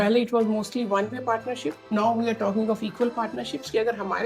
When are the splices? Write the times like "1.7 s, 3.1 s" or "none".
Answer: 1.8 s